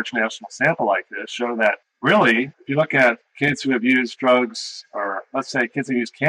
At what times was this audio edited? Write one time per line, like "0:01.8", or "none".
0:01.9
0:02.5